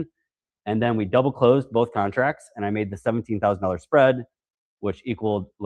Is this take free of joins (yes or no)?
yes